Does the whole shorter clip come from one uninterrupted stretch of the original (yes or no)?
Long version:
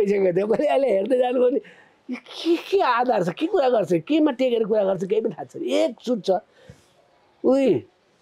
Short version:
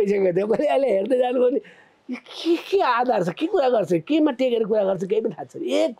yes